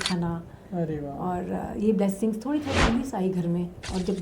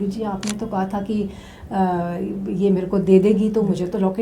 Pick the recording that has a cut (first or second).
first